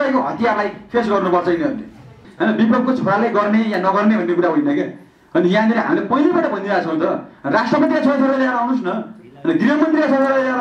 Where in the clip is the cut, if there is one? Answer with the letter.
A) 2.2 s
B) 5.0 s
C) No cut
A